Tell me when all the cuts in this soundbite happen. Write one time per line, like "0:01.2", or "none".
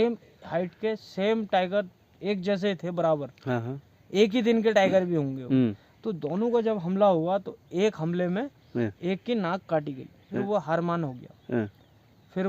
0:10.3